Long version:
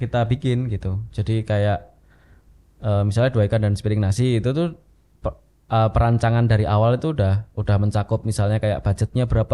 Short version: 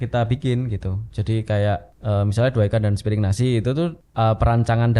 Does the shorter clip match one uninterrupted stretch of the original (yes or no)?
no